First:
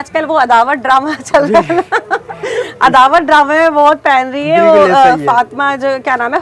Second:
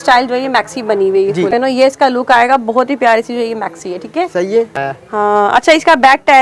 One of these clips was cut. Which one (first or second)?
second